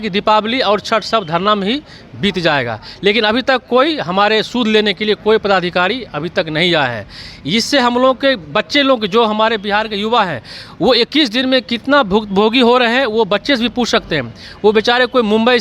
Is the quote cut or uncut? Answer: uncut